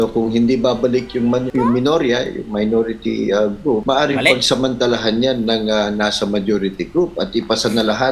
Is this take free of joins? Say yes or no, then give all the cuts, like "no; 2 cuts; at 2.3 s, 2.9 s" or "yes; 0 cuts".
no; 2 cuts; at 1.5 s, 3.8 s